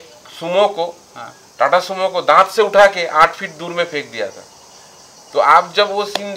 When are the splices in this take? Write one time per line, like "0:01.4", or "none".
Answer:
none